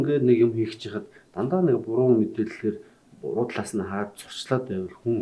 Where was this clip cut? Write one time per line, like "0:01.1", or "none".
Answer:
none